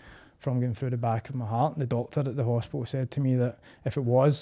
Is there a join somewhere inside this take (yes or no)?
no